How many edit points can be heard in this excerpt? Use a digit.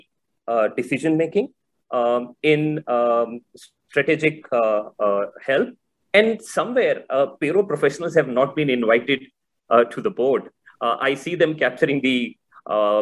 0